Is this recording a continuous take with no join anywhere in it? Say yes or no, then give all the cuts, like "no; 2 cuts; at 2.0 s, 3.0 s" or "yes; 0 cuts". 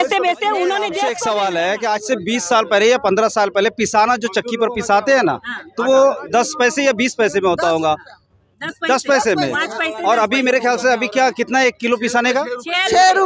no; 1 cut; at 1.2 s